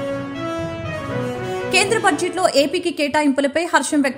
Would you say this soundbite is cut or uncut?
cut